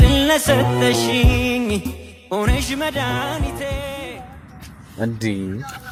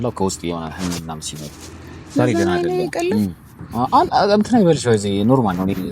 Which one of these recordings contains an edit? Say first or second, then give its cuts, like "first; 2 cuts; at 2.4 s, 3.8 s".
second; 1 cut; at 3.6 s